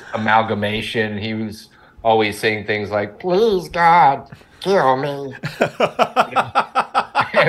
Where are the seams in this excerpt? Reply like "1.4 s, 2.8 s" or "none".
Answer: none